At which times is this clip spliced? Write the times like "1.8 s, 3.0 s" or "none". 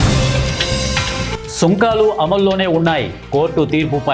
none